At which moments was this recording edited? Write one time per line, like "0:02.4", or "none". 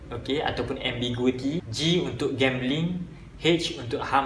0:01.7